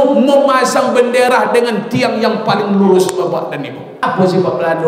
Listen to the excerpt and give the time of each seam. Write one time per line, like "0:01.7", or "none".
0:03.9